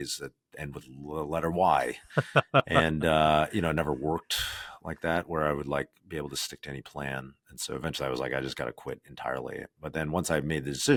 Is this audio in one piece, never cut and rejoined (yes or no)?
yes